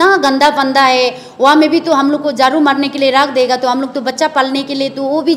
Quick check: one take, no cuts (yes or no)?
yes